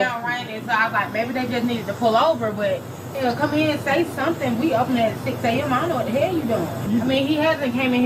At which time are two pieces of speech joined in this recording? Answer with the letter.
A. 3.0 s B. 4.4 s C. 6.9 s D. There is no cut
C